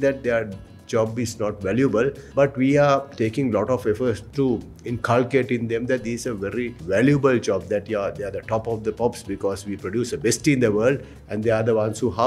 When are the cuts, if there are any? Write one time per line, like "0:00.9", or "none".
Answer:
0:02.2
0:04.2
0:06.8